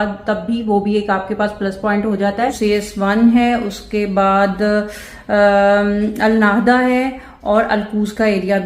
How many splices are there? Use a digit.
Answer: 1